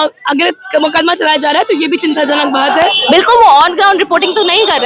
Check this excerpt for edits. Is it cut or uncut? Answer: cut